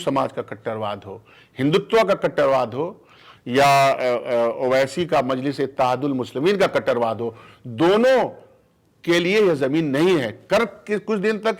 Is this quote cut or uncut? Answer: uncut